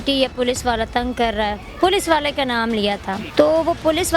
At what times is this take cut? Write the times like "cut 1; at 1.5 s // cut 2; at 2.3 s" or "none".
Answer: cut 1; at 3.2 s